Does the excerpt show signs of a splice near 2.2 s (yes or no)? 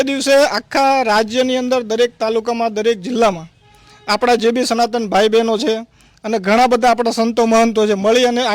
no